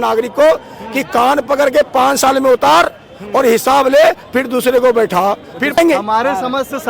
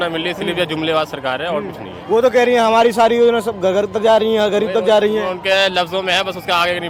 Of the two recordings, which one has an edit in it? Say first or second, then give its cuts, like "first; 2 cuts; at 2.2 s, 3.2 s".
first; 1 cut; at 5.8 s